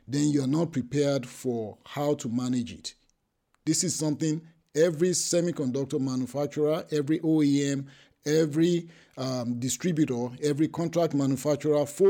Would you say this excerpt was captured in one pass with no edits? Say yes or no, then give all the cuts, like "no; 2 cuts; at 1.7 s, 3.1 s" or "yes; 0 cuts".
yes; 0 cuts